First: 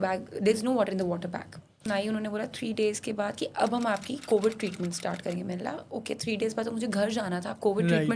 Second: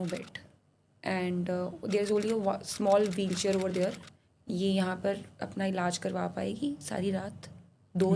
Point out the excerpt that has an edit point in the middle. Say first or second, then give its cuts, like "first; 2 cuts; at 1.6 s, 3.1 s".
first; 1 cut; at 1.9 s